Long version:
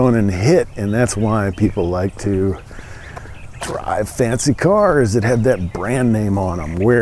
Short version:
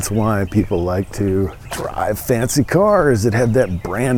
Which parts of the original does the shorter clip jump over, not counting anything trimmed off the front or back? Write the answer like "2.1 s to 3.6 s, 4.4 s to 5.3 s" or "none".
2.7 s to 3.6 s